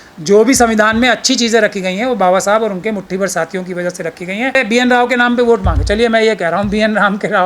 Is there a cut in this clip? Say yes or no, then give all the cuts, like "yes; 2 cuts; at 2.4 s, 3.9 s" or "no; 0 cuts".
yes; 1 cut; at 4.6 s